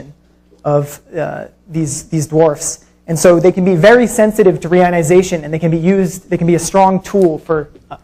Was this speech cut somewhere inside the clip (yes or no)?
no